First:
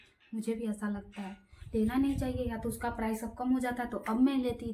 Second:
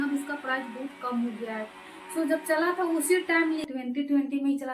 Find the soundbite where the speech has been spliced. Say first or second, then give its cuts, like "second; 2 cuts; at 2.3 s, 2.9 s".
second; 1 cut; at 3.6 s